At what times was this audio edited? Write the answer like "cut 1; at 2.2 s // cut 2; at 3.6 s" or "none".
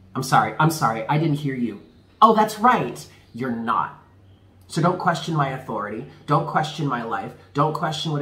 none